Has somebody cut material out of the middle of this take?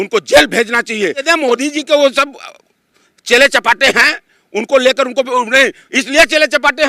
yes; 1 cut; at 1.3 s

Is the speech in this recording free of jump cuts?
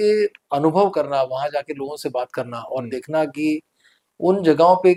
yes; 0 cuts

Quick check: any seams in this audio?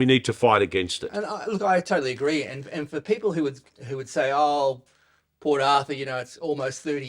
yes; 1 cut; at 1.1 s

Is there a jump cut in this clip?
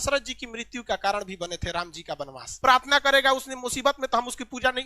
yes; 1 cut; at 2.5 s

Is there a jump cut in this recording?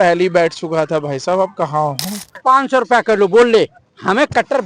yes; 1 cut; at 2.3 s

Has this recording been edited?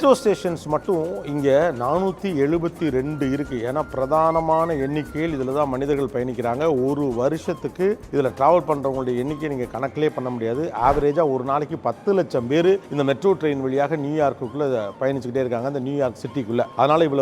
no; 0 cuts

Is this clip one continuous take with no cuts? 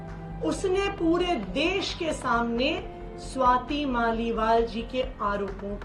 yes; 0 cuts

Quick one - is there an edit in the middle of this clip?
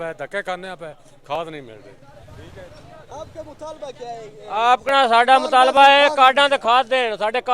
no; 0 cuts

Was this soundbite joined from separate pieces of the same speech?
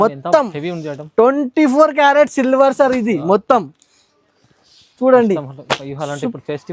no; 0 cuts

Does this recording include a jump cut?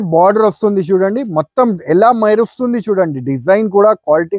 no; 0 cuts

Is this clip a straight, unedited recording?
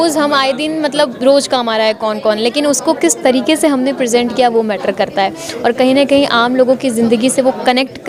yes; 0 cuts

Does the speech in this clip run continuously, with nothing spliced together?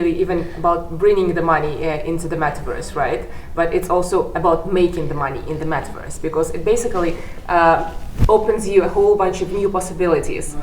yes; 0 cuts

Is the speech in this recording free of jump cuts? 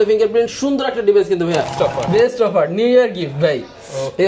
no; 1 cut; at 1.7 s

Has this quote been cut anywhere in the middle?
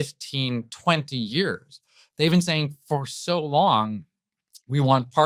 no; 0 cuts

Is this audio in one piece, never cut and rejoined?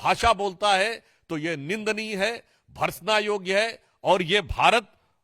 yes; 0 cuts

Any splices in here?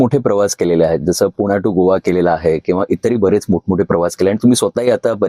no; 0 cuts

